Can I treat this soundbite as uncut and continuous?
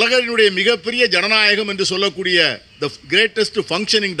yes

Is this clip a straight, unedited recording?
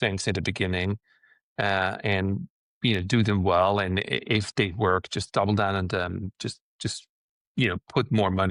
yes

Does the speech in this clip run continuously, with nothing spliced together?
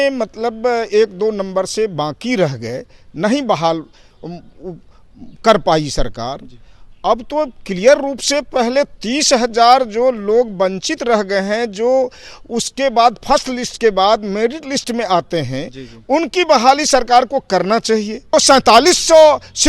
no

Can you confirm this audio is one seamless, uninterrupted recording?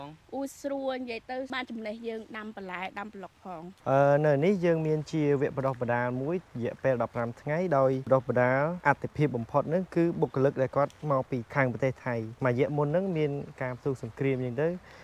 no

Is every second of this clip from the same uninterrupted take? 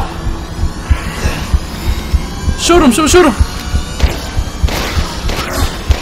yes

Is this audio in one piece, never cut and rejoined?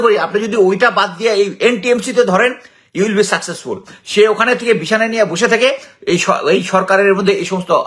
yes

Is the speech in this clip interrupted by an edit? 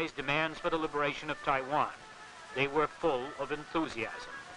yes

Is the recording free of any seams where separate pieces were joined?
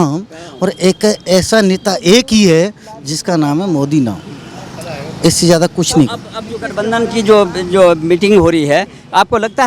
yes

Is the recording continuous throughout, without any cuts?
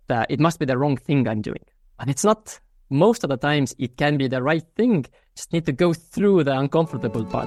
yes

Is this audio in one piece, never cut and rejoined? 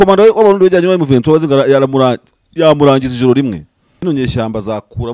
no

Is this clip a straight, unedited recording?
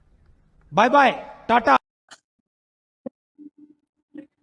no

